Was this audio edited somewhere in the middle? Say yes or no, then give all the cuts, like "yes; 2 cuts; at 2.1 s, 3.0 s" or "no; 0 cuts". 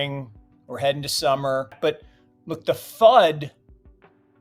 yes; 1 cut; at 1.8 s